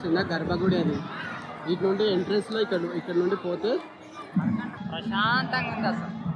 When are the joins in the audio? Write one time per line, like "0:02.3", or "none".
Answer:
0:04.8